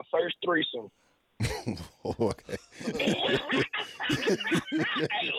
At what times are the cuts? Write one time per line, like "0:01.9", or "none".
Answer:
none